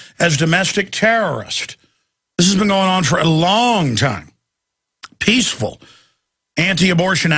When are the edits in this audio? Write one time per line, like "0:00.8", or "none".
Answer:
0:01.1